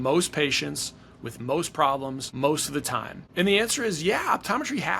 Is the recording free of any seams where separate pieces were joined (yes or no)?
no